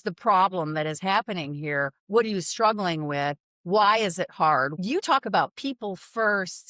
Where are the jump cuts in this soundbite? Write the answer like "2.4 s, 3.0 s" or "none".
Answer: 4.7 s